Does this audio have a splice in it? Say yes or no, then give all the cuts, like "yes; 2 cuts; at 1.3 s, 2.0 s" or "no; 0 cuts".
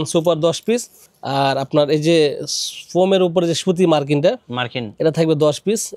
no; 0 cuts